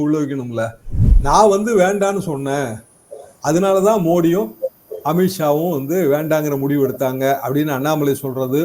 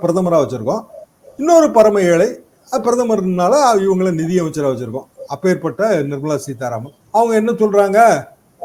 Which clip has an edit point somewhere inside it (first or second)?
first